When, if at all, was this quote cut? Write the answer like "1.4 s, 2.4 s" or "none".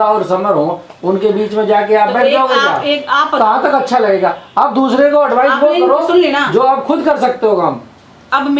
none